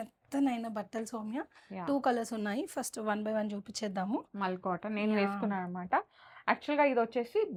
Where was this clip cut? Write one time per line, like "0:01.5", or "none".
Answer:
none